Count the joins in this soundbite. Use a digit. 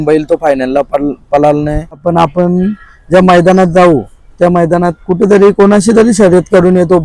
1